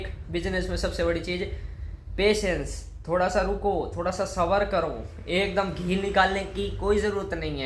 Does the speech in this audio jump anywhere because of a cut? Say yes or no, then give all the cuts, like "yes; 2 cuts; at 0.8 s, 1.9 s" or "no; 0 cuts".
no; 0 cuts